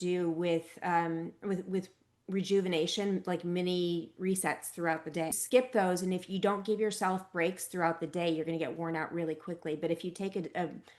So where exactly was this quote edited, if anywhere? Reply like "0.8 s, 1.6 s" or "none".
5.4 s